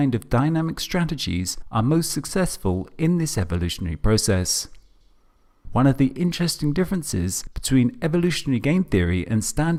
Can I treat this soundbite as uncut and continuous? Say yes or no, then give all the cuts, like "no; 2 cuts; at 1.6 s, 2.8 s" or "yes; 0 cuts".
yes; 0 cuts